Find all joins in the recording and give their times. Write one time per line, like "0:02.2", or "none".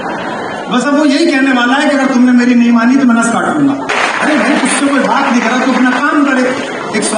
0:03.9

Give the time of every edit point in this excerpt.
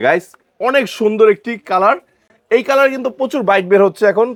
none

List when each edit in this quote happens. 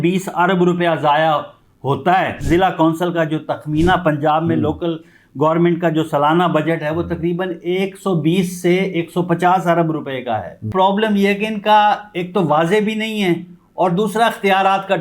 0:02.4
0:10.7

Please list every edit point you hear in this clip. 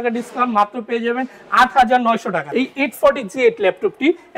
0:02.5

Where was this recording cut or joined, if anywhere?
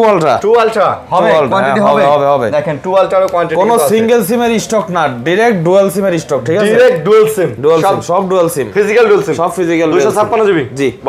none

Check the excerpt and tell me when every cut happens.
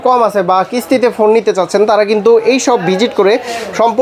none

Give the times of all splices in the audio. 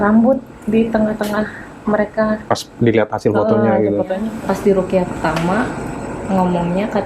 0:04.3

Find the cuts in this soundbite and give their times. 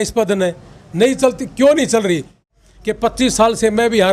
0:02.5

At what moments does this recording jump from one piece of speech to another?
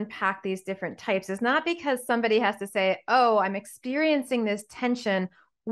none

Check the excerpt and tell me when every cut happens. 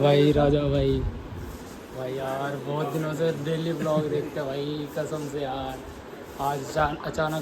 none

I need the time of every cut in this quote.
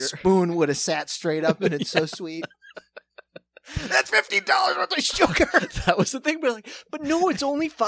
none

